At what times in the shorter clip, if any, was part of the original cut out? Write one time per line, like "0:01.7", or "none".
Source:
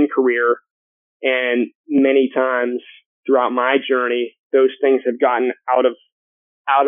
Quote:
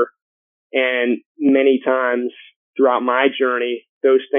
none